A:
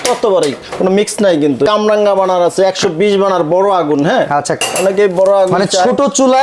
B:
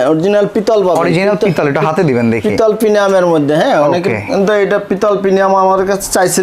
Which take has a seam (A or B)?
A